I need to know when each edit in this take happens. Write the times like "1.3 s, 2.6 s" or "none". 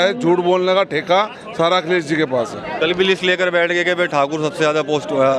none